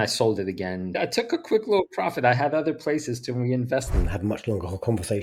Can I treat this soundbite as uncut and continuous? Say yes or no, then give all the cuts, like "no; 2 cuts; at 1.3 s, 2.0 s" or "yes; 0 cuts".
no; 2 cuts; at 1.0 s, 3.9 s